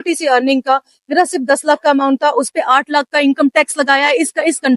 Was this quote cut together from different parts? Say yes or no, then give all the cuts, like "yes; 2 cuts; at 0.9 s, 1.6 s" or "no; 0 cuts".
no; 0 cuts